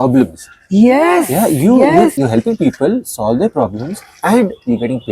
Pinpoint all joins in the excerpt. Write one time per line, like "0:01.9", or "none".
0:02.2